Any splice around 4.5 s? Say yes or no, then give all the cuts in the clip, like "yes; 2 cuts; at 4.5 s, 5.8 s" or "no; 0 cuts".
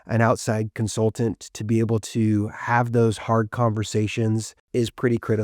yes; 1 cut; at 4.5 s